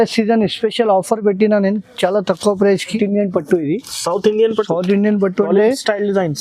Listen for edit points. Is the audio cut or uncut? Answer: cut